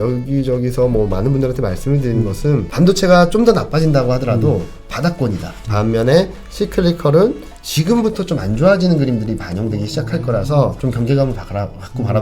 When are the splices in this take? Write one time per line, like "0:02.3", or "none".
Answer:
0:02.7
0:05.5
0:10.8